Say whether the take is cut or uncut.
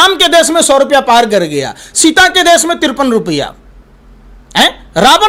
uncut